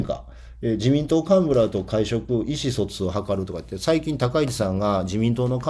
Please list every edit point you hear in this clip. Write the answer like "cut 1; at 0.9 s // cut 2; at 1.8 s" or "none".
none